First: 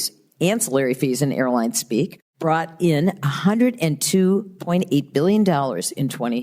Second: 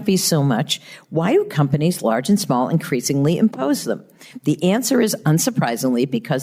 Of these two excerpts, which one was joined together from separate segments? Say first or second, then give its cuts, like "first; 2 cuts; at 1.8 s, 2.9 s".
first; 1 cut; at 2.2 s